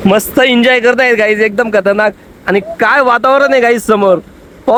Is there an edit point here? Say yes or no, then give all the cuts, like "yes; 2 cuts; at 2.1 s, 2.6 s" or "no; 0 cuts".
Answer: no; 0 cuts